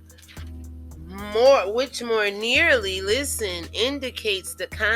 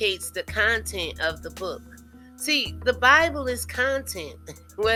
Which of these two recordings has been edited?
first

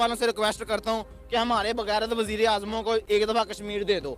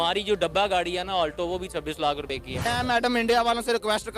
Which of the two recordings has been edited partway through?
second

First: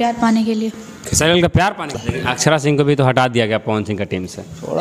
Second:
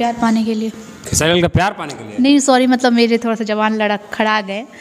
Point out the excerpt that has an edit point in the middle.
first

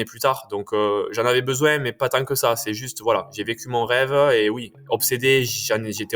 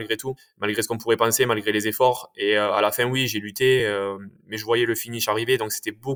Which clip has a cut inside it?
first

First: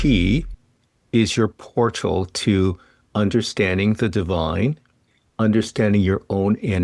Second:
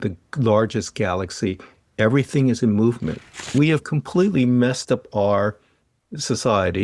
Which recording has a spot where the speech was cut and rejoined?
second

